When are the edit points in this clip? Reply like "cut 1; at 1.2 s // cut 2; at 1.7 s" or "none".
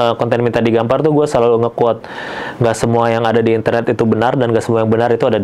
none